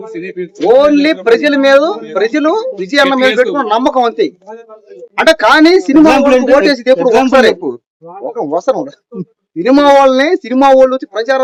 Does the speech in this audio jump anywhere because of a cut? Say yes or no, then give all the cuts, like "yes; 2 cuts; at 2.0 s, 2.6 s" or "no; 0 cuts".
no; 0 cuts